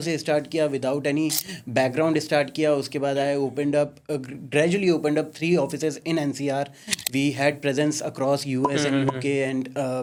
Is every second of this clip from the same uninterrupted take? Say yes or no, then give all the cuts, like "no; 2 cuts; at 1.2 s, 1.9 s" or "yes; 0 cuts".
yes; 0 cuts